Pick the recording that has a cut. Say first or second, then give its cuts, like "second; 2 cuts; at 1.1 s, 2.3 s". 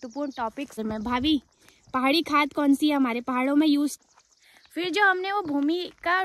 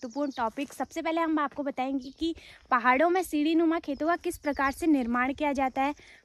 first; 2 cuts; at 0.8 s, 4.0 s